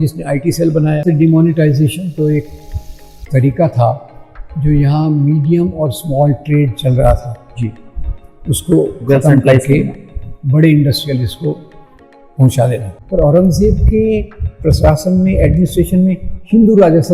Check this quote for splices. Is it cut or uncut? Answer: cut